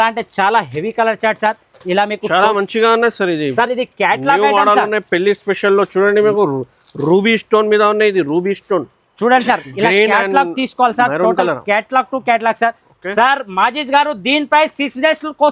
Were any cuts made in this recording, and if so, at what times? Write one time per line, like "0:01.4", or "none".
none